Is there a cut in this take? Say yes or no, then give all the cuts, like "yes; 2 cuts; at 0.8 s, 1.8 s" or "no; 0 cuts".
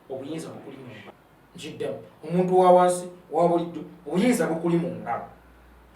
yes; 1 cut; at 1.1 s